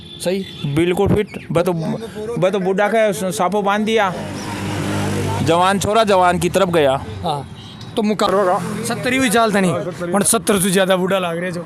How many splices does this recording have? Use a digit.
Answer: 1